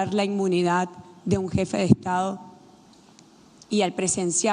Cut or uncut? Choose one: uncut